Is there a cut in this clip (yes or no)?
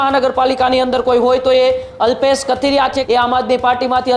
yes